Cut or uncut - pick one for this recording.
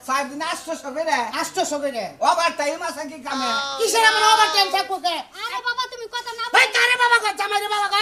cut